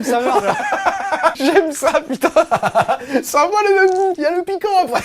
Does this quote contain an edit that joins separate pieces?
yes; 2 cuts; at 1.4 s, 4.2 s

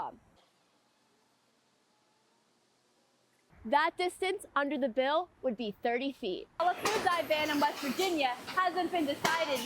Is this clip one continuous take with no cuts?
no; 1 cut; at 6.6 s

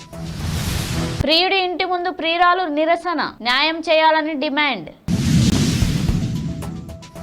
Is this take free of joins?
no; 2 cuts; at 1.2 s, 5.5 s

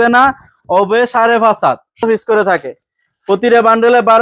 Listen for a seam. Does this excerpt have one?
yes; 1 cut; at 2.0 s

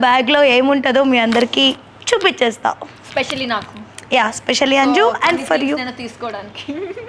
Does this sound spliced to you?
no; 0 cuts

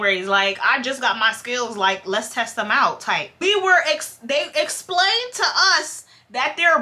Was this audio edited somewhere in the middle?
yes; 1 cut; at 3.4 s

